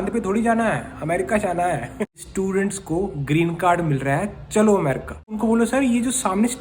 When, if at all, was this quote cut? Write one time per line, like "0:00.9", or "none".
0:02.0
0:05.4